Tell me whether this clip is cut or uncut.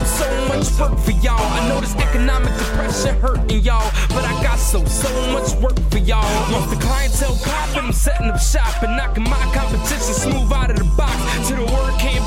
uncut